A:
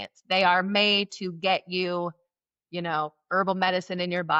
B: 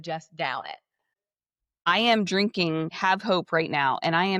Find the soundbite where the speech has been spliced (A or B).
B